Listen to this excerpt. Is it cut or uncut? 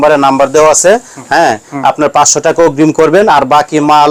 uncut